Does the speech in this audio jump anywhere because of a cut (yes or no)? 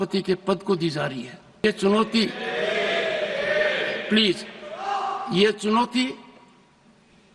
yes